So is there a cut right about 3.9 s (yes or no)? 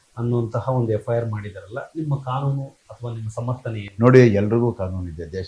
no